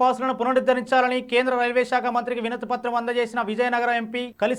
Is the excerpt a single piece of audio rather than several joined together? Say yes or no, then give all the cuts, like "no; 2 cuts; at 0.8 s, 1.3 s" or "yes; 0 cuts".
yes; 0 cuts